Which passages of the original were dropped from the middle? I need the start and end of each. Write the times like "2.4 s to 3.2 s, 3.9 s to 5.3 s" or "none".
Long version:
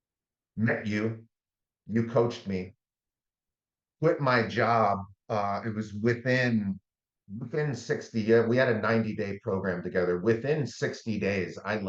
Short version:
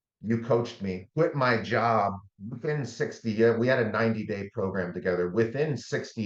2.7 s to 3.9 s, 5.1 s to 7.2 s